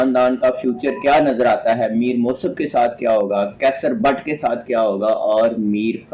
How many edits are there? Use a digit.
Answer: 0